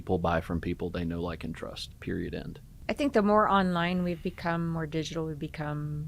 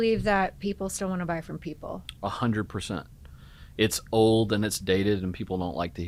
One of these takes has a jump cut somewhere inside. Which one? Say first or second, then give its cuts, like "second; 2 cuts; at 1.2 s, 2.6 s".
first; 1 cut; at 2.6 s